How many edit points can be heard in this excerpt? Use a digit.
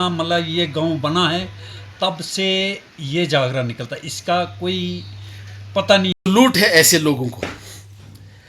1